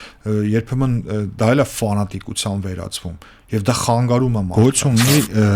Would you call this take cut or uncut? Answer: cut